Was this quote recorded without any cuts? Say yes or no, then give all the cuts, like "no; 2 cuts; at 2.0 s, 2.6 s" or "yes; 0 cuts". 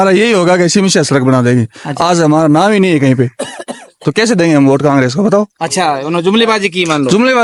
yes; 0 cuts